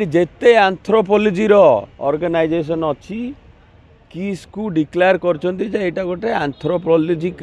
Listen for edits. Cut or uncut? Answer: uncut